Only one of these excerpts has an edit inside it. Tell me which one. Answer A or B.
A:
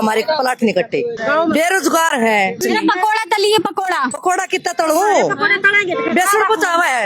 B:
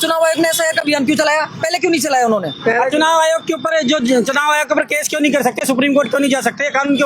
A